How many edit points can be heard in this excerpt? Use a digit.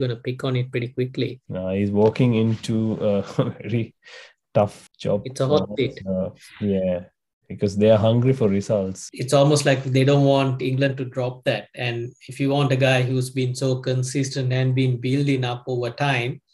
3